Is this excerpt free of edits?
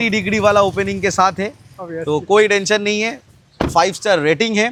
yes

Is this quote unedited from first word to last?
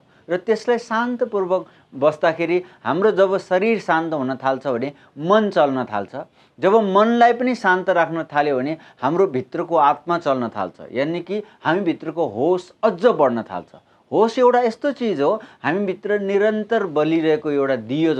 yes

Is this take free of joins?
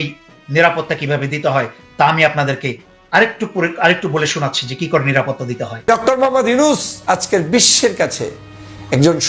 no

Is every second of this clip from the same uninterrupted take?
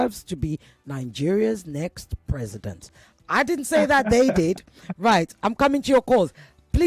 yes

